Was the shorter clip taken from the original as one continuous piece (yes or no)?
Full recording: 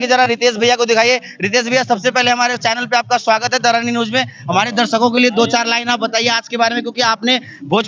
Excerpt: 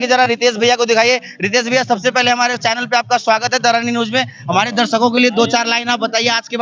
yes